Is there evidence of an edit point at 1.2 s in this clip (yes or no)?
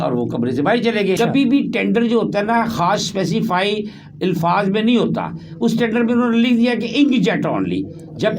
yes